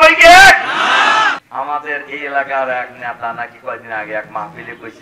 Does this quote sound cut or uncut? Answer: cut